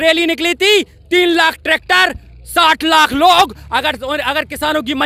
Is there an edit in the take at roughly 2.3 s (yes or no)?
no